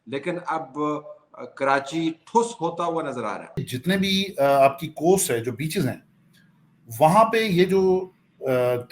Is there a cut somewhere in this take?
yes; 1 cut; at 3.7 s

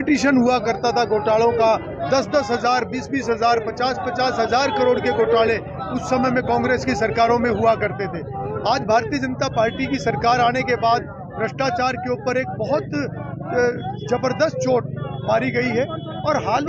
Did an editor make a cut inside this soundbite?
no; 0 cuts

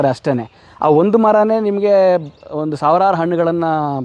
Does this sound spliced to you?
no; 0 cuts

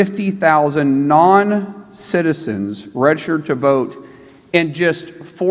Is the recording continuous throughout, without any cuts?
yes; 0 cuts

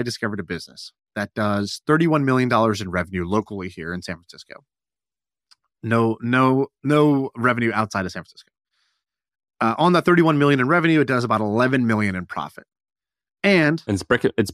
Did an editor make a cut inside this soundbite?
no; 0 cuts

